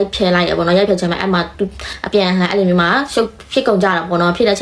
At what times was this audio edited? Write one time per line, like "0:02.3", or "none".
none